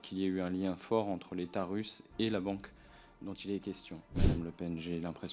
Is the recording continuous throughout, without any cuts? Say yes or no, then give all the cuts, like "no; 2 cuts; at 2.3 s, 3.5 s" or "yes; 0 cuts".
no; 1 cut; at 4.2 s